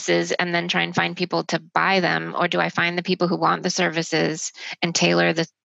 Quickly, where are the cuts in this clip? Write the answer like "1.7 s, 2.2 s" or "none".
none